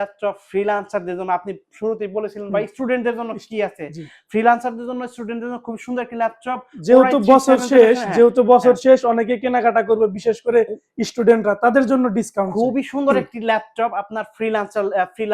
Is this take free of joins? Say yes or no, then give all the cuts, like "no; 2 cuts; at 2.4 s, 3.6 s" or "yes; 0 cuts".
yes; 0 cuts